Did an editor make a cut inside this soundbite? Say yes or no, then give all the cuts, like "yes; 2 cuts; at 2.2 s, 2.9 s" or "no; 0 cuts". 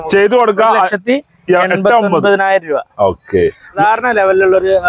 yes; 1 cut; at 3.8 s